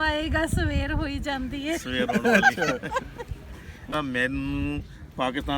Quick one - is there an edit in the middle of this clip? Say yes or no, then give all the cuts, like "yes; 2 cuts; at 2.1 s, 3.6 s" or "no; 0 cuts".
yes; 1 cut; at 3.9 s